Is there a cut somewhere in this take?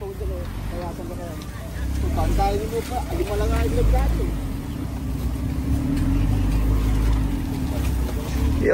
no; 0 cuts

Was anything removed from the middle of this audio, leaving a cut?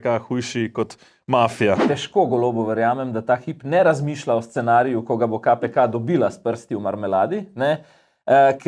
yes; 1 cut; at 1.8 s

